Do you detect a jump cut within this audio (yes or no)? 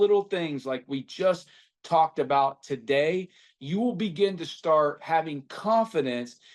no